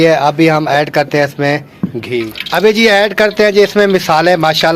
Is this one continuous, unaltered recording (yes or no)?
no